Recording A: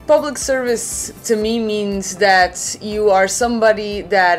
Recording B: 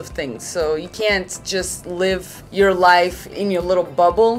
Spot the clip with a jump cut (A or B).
B